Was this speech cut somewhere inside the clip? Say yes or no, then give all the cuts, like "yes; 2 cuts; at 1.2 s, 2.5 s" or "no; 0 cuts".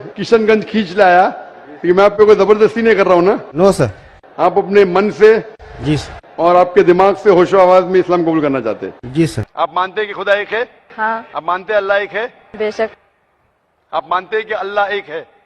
yes; 1 cut; at 9.4 s